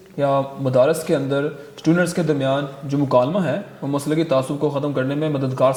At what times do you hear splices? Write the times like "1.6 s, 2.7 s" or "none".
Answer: none